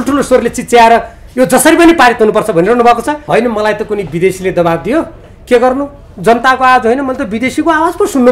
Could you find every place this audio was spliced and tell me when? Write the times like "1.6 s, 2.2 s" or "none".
3.1 s